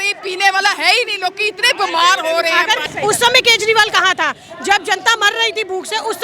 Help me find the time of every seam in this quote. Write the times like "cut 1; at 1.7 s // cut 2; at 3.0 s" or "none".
cut 1; at 2.8 s